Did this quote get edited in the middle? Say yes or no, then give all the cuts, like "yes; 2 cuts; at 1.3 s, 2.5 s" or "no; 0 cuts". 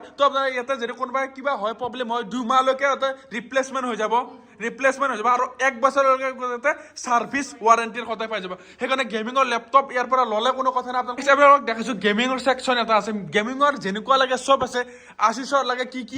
yes; 1 cut; at 11.2 s